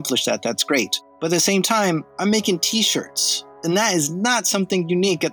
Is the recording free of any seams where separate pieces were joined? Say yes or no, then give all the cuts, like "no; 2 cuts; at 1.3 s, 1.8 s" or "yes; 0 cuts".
no; 2 cuts; at 1.0 s, 3.5 s